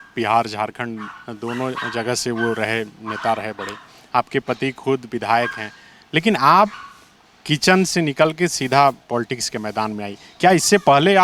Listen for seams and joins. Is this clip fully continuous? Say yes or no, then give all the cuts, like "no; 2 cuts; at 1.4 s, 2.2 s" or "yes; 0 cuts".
yes; 0 cuts